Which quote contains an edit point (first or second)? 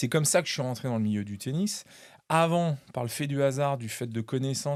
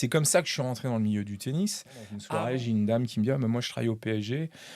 second